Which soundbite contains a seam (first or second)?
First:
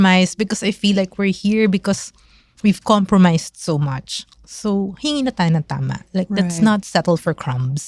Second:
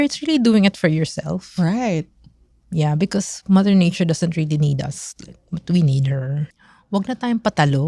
second